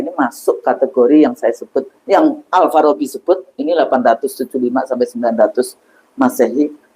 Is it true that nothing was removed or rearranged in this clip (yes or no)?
yes